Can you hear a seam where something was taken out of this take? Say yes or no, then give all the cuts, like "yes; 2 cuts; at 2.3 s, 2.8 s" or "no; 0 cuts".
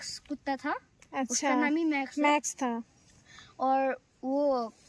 no; 0 cuts